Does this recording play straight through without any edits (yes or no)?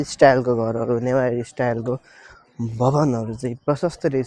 yes